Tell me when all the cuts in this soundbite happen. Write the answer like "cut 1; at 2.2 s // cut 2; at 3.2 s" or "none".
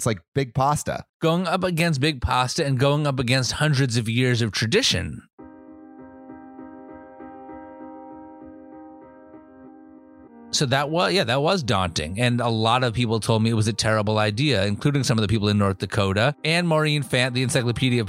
cut 1; at 1.0 s